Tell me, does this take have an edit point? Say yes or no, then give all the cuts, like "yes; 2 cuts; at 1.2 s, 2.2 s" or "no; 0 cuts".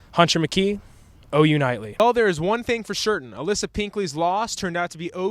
yes; 1 cut; at 2.0 s